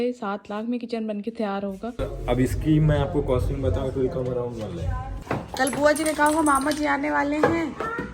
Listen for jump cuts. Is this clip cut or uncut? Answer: cut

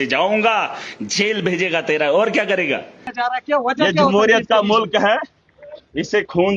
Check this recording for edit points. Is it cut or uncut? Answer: cut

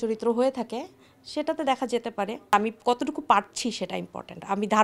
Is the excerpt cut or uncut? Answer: cut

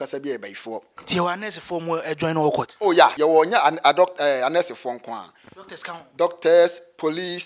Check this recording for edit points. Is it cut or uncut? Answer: cut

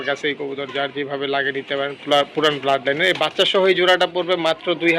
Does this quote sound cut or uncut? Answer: uncut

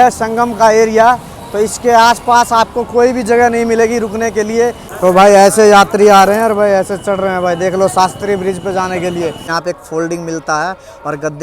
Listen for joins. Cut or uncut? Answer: cut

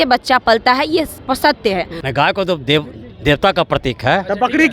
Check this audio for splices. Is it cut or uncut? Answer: cut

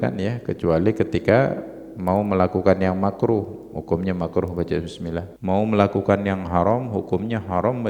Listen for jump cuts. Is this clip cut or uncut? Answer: cut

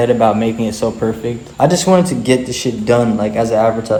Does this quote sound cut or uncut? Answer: uncut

